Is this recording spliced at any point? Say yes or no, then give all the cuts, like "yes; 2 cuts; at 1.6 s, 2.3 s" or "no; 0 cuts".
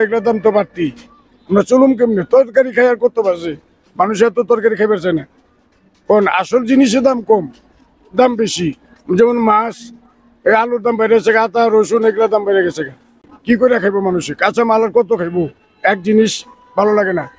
no; 0 cuts